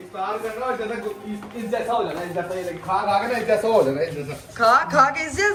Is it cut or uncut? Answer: uncut